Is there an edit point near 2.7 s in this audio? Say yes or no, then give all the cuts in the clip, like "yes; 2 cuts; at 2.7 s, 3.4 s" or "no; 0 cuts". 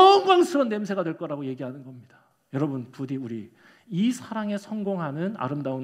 no; 0 cuts